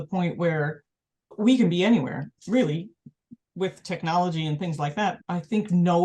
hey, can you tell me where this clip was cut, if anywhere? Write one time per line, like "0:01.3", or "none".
0:01.3
0:05.2

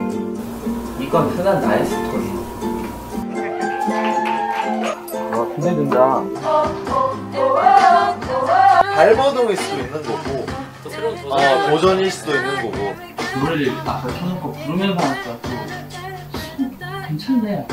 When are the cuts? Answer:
0:07.8

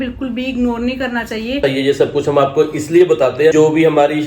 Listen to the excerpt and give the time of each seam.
0:01.6
0:03.5

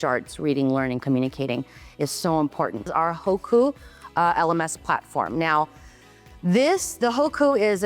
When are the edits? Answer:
0:02.9

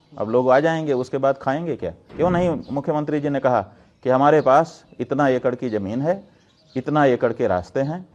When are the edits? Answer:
0:02.0

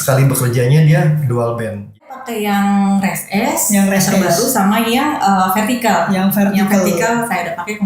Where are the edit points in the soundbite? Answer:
0:02.1

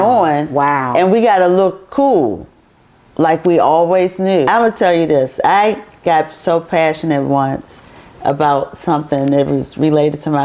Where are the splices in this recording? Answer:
0:04.5

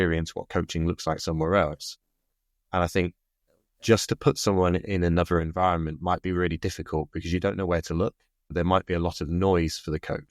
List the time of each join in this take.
0:08.5

